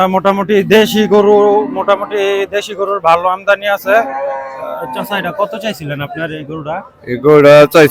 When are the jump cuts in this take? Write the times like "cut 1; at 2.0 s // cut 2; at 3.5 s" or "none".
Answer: none

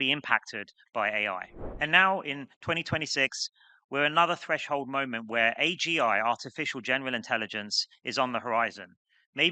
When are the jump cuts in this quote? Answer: cut 1; at 1.6 s

